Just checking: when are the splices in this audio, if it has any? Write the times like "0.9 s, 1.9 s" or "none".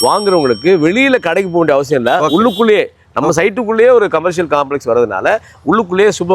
none